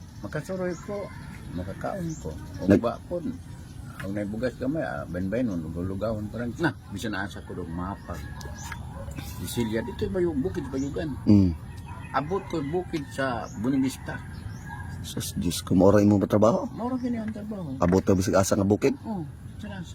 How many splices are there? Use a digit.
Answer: 1